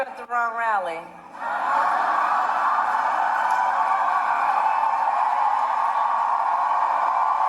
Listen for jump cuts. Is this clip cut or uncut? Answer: cut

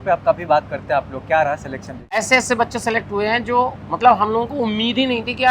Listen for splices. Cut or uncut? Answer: cut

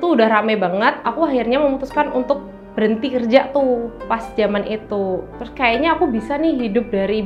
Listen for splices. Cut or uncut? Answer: uncut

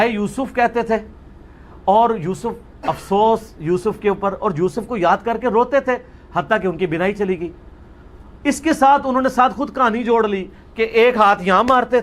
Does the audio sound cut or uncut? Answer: cut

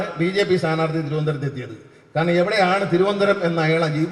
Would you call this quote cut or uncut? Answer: uncut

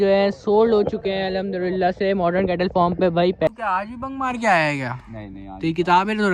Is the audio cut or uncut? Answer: cut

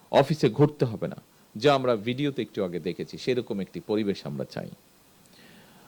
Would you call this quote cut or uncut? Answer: uncut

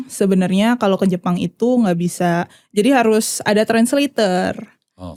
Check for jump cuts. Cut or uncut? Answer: uncut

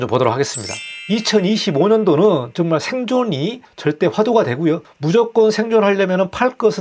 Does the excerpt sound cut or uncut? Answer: cut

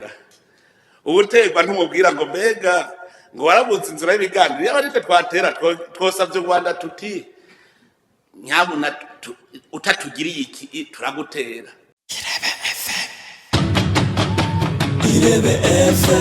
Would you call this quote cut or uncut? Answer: cut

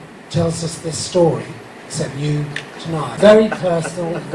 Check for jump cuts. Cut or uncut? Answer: cut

